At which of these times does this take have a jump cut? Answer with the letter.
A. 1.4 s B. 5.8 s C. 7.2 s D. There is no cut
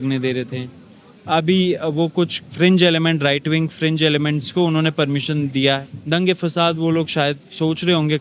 B